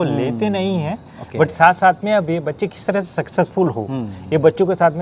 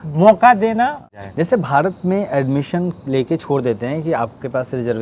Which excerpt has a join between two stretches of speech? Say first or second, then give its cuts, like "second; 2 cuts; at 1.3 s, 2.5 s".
second; 1 cut; at 1.0 s